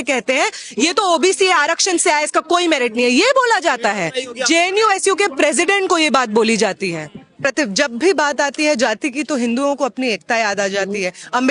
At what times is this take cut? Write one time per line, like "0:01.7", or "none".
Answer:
0:07.5